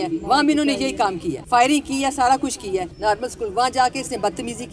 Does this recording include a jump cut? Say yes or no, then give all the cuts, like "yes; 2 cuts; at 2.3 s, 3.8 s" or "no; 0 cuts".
yes; 1 cut; at 2.9 s